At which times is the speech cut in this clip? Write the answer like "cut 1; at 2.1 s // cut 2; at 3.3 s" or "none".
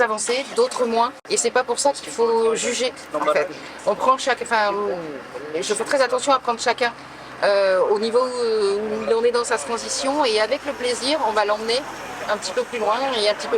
cut 1; at 1.2 s